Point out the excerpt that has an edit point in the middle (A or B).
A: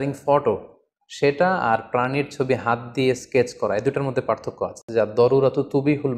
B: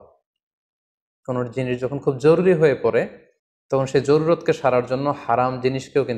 A